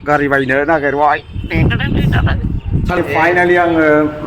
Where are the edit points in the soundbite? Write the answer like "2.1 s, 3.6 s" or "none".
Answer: 3.0 s